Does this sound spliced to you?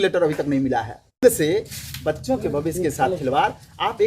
yes; 1 cut; at 1.2 s

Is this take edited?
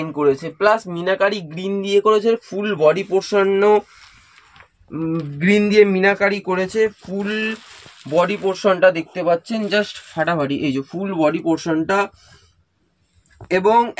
no; 0 cuts

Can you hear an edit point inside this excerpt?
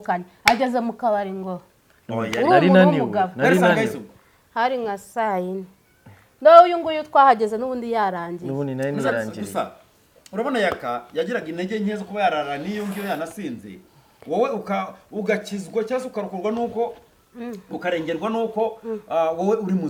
no; 0 cuts

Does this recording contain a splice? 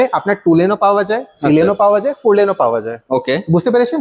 no; 0 cuts

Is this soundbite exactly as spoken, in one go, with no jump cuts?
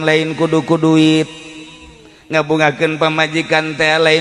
yes; 0 cuts

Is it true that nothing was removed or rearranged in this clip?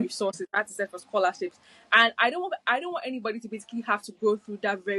yes; 0 cuts

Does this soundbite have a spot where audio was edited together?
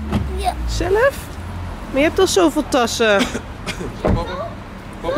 no; 0 cuts

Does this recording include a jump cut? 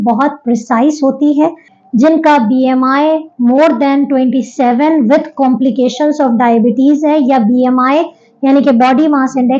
yes; 1 cut; at 1.7 s

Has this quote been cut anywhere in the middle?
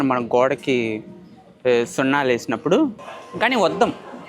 yes; 1 cut; at 3.0 s

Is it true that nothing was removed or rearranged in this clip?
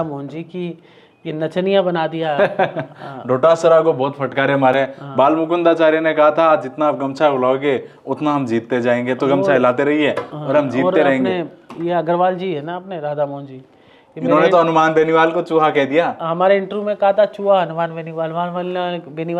yes; 0 cuts

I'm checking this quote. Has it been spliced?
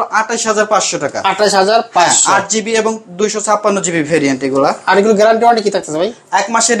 no; 0 cuts

